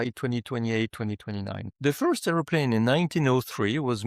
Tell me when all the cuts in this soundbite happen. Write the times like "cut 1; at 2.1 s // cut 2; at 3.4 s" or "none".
cut 1; at 1.7 s